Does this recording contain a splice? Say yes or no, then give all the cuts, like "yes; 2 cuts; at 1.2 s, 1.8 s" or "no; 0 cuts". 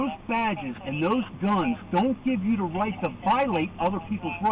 no; 0 cuts